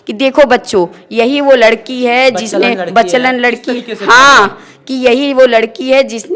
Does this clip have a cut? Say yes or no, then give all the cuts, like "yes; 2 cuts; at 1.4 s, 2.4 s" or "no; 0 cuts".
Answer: no; 0 cuts